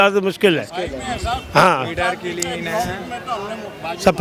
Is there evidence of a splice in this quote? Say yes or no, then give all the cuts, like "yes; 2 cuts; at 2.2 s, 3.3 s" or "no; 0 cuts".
no; 0 cuts